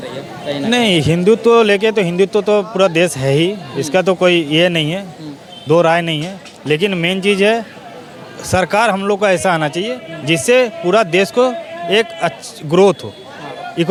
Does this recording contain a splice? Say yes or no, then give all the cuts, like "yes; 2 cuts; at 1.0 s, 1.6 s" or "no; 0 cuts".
no; 0 cuts